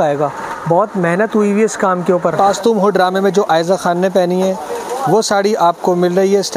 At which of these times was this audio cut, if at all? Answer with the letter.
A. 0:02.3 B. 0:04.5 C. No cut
A